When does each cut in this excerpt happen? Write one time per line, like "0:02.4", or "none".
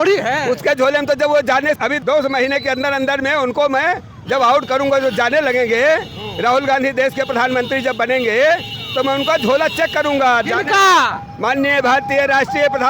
0:01.9